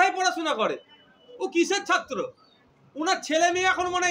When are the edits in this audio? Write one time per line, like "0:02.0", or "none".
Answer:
none